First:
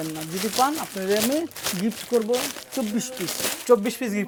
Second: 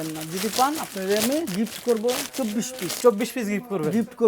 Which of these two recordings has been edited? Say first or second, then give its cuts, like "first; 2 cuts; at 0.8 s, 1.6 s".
second; 2 cuts; at 1.5 s, 2.4 s